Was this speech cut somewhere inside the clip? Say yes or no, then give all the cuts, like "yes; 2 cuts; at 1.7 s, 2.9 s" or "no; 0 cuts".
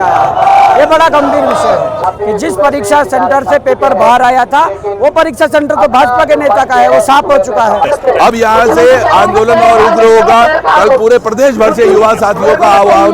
yes; 2 cuts; at 2.0 s, 7.8 s